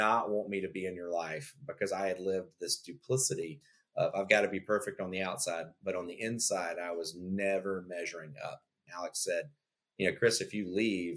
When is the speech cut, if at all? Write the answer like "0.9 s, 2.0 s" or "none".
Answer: 8.8 s